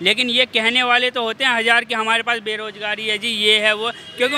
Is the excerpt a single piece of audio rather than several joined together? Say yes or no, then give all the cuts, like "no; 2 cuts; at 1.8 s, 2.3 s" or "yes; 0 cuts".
yes; 0 cuts